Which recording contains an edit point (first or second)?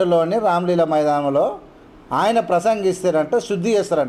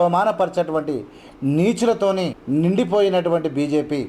second